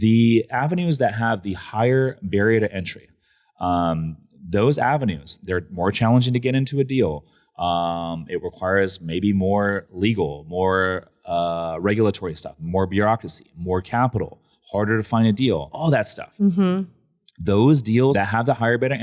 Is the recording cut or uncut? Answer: cut